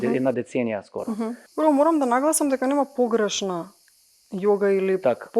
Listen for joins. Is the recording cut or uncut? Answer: cut